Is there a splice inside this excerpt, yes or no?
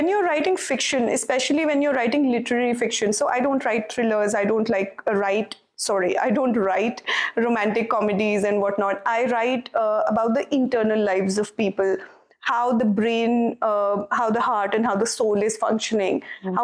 no